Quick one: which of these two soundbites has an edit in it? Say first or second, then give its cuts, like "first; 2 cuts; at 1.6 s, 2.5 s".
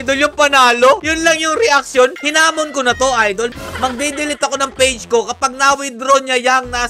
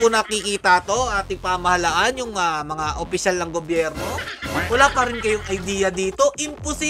first; 2 cuts; at 2.2 s, 3.5 s